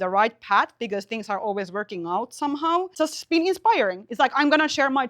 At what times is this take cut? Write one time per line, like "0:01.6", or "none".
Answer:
0:02.9

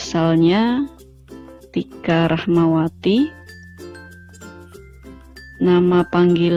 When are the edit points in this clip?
none

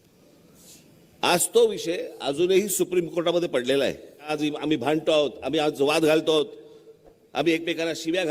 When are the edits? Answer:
0:04.3

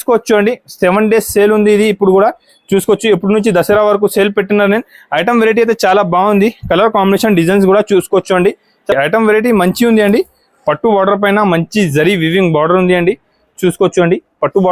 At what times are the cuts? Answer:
0:08.9

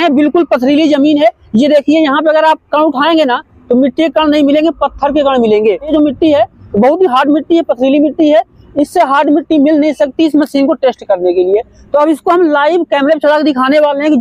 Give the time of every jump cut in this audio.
none

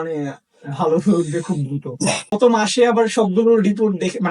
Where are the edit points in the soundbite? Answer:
0:02.2

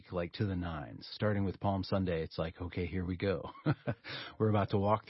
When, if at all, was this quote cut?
0:01.1

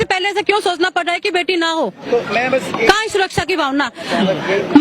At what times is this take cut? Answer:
none

